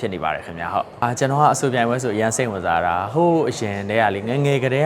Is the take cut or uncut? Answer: cut